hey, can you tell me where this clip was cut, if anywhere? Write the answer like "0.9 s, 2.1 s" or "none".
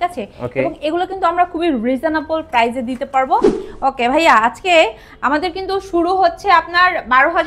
3.6 s